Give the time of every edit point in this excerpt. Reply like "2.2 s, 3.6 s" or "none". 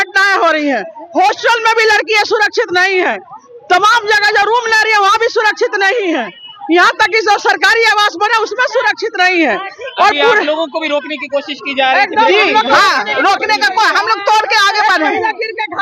none